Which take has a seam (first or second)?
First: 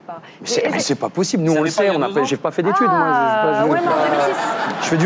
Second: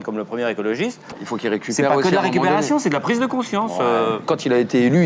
second